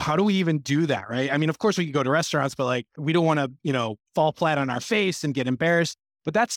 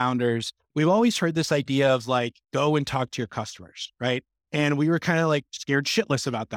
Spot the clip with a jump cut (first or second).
first